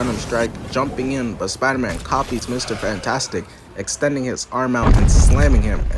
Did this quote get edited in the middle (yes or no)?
no